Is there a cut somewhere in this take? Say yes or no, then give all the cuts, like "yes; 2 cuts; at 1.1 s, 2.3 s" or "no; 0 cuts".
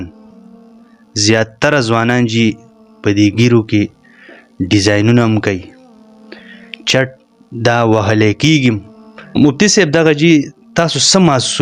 yes; 1 cut; at 9.4 s